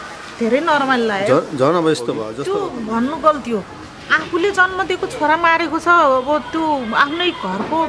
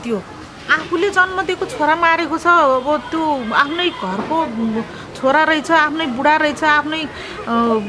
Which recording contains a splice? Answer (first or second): first